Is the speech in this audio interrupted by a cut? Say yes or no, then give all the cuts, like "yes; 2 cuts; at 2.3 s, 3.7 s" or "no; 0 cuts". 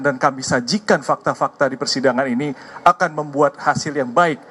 no; 0 cuts